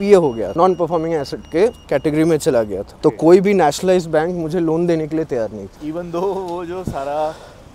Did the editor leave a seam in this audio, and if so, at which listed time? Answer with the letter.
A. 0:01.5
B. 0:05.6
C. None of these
C